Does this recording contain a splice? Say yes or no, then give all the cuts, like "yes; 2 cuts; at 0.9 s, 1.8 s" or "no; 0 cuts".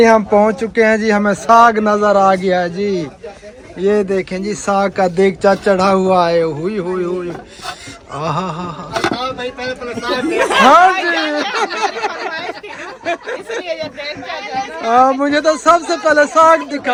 no; 0 cuts